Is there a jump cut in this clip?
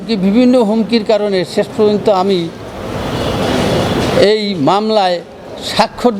no; 0 cuts

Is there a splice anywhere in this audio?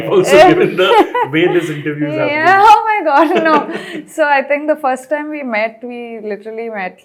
no; 0 cuts

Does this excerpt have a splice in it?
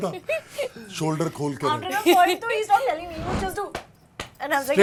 no; 0 cuts

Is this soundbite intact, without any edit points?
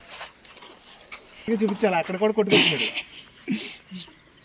no; 1 cut; at 1.4 s

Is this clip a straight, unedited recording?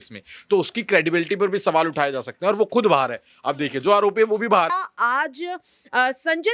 no; 1 cut; at 4.7 s

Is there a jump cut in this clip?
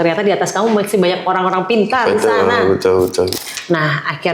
yes; 1 cut; at 3.3 s

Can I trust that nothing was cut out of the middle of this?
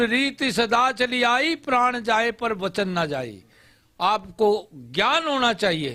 yes; 0 cuts

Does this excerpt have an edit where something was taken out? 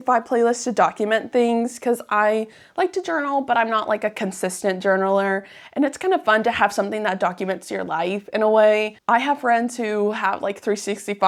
no; 0 cuts

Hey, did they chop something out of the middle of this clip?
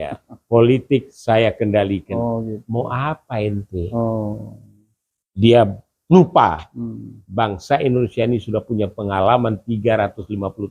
no; 0 cuts

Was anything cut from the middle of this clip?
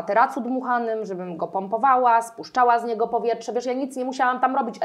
no; 0 cuts

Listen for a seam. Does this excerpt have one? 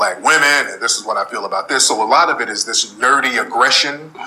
no; 0 cuts

